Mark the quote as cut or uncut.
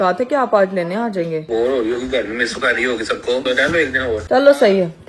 cut